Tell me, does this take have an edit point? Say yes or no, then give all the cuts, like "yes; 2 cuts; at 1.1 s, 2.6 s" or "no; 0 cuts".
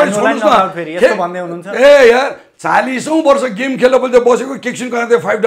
no; 0 cuts